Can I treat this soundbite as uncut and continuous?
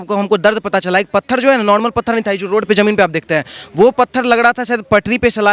yes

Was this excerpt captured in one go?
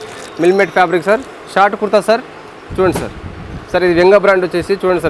no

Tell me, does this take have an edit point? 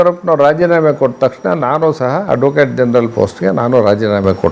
no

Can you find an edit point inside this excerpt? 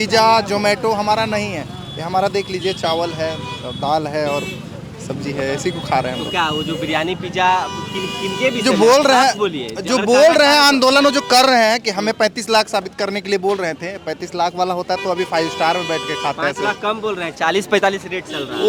no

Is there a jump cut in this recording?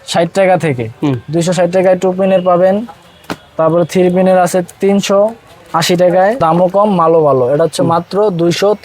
yes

